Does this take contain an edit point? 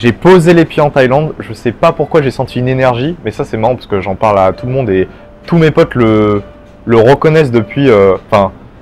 no; 0 cuts

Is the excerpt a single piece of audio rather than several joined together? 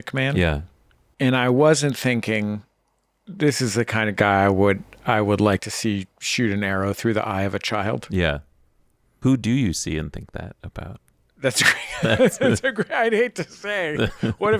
yes; 0 cuts

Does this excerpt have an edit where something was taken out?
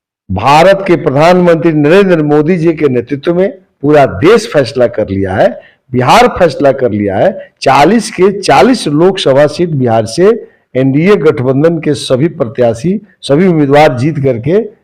no; 0 cuts

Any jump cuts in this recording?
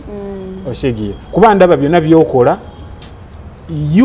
no; 0 cuts

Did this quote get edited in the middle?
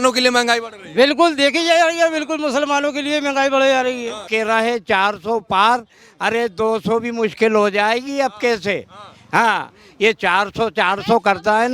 yes; 1 cut; at 4.3 s

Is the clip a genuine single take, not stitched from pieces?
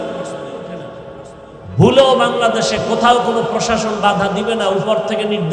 yes; 0 cuts

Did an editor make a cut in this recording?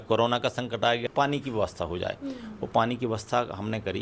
yes; 1 cut; at 1.0 s

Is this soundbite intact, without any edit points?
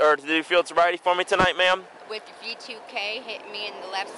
yes; 0 cuts

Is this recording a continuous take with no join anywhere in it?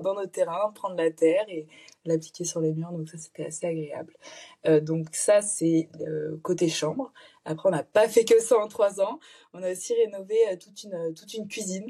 yes; 0 cuts

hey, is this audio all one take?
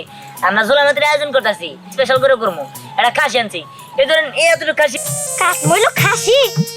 no; 2 cuts; at 1.8 s, 4.9 s

